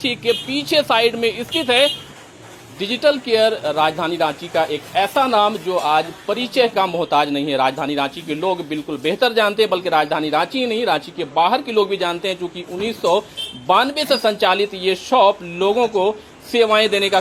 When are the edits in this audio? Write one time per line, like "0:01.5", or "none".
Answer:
none